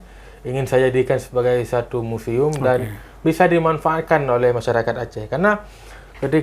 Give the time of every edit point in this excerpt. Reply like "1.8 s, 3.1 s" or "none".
none